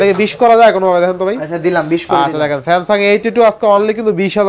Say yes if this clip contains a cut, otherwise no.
no